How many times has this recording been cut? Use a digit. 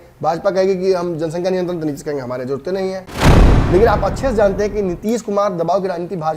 1